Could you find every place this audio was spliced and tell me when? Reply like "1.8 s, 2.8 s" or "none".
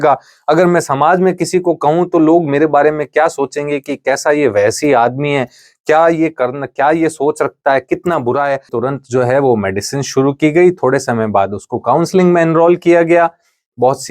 8.7 s